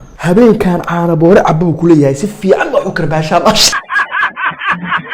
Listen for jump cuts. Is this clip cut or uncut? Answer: uncut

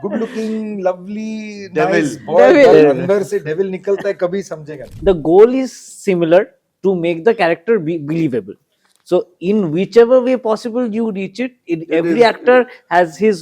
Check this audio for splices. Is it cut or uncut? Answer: cut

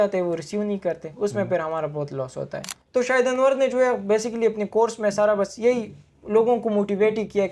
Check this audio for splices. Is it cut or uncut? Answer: cut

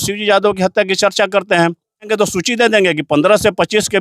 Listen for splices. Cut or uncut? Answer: cut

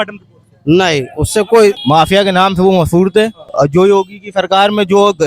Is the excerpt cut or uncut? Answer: cut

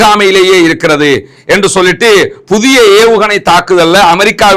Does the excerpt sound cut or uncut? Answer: uncut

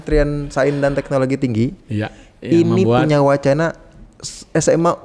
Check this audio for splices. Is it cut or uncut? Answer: uncut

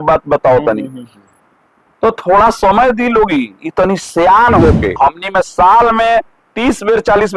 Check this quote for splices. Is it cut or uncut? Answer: cut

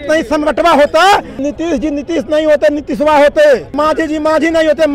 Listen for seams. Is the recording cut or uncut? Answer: cut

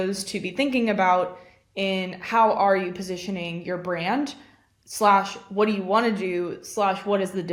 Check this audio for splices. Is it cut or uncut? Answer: uncut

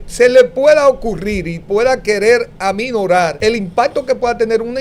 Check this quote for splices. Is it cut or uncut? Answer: cut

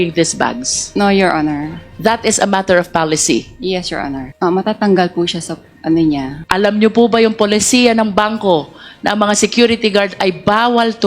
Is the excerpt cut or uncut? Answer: uncut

